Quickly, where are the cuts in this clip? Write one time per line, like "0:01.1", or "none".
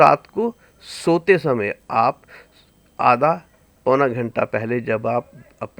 none